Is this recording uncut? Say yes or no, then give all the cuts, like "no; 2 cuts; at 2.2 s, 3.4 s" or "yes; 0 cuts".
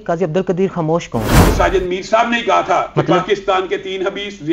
no; 1 cut; at 1.4 s